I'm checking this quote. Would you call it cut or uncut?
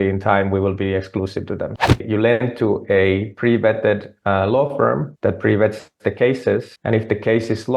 cut